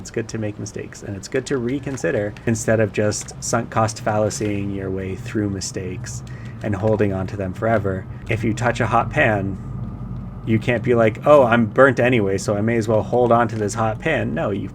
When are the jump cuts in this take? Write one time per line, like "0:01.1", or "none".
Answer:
0:02.4
0:08.1